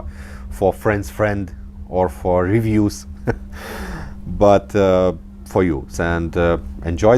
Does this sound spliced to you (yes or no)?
yes